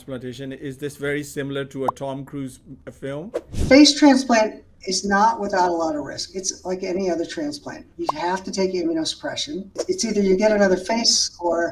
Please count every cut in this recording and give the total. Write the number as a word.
two